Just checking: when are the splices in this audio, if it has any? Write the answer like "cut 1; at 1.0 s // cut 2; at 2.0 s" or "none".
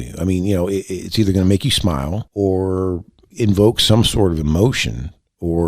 cut 1; at 2.2 s